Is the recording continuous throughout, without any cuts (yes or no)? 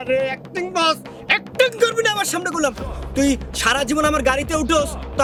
yes